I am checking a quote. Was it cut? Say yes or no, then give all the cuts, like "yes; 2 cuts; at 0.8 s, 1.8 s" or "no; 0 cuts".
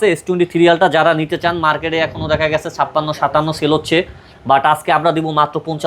no; 0 cuts